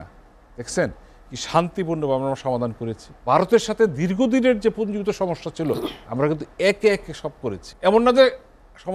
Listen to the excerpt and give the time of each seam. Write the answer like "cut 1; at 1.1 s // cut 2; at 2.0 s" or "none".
cut 1; at 3.1 s // cut 2; at 7.7 s